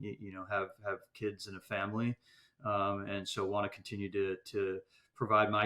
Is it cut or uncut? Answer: uncut